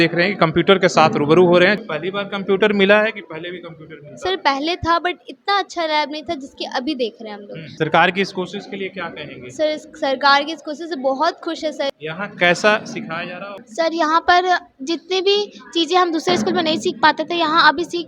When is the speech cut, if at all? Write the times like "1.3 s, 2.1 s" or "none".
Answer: 1.8 s, 7.7 s, 11.9 s, 13.6 s